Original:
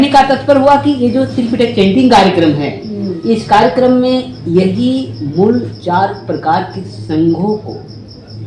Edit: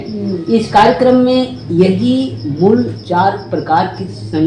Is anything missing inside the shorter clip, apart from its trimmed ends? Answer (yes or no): no